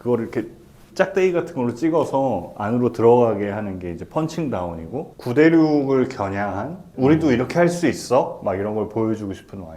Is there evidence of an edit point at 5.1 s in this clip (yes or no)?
yes